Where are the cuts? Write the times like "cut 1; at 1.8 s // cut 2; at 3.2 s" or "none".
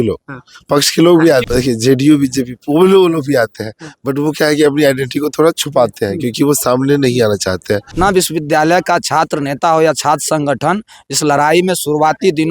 cut 1; at 1.5 s // cut 2; at 7.9 s